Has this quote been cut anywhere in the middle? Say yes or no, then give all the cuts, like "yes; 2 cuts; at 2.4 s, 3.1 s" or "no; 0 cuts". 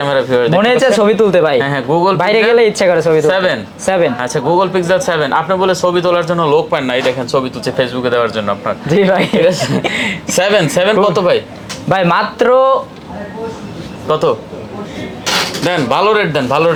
no; 0 cuts